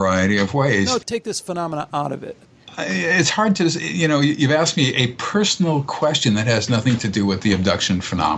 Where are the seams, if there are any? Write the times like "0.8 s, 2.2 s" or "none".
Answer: 1.0 s, 2.6 s